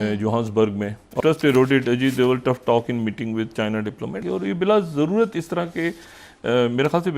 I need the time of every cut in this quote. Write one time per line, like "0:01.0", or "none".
0:01.2
0:04.2